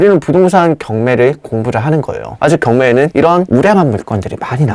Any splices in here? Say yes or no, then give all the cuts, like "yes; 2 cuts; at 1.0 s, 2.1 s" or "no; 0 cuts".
no; 0 cuts